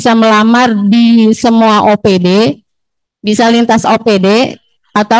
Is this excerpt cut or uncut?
uncut